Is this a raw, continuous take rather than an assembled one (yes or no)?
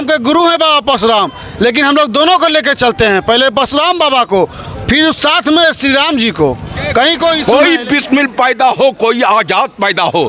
no